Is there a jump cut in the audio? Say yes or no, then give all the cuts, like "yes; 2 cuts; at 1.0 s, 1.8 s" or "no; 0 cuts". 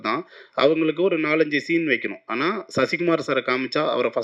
no; 0 cuts